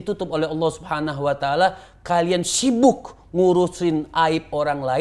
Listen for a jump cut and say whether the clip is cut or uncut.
uncut